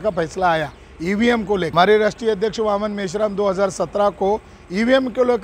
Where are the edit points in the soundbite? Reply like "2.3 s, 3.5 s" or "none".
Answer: 1.7 s

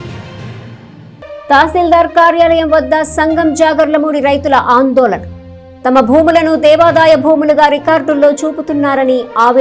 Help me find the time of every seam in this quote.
none

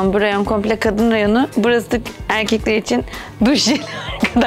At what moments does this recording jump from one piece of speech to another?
1.5 s

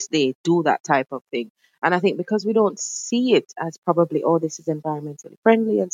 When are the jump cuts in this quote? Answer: none

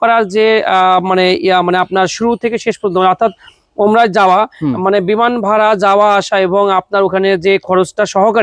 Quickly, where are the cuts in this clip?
none

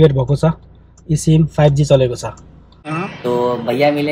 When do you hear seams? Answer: 2.8 s

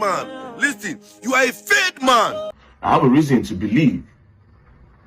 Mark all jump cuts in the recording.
2.5 s

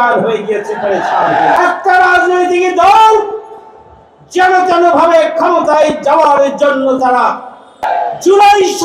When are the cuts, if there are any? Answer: 1.6 s, 7.8 s

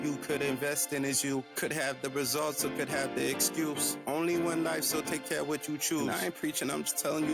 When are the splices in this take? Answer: none

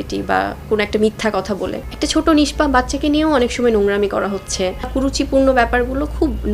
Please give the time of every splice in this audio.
1.8 s, 4.9 s

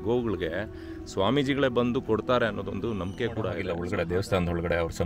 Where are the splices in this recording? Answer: 3.7 s

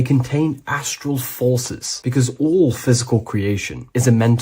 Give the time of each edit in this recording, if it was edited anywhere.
1.3 s

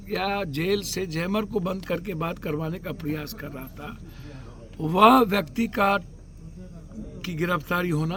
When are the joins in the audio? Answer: none

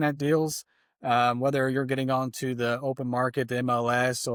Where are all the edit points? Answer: none

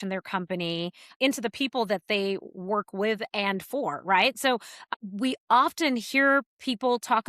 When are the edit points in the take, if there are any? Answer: 1.1 s, 4.9 s

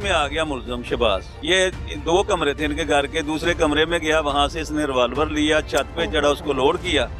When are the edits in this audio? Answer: 1.4 s

